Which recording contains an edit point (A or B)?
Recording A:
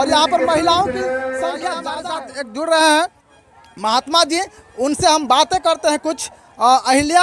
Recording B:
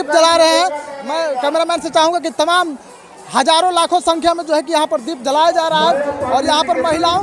A